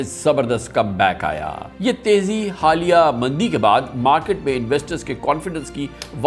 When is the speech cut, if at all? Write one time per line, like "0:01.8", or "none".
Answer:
0:01.7